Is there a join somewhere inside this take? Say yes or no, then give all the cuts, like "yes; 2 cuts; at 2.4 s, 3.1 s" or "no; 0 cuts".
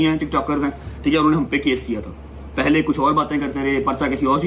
no; 0 cuts